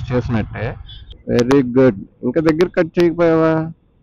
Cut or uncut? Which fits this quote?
cut